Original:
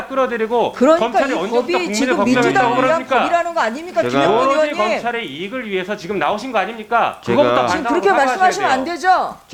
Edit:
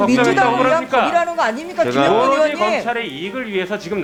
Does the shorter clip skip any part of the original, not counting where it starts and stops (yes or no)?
no